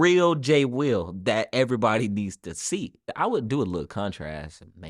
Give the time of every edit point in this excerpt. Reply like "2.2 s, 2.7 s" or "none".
3.1 s